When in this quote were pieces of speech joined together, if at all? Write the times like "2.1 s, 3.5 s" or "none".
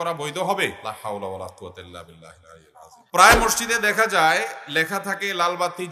0.8 s, 3.0 s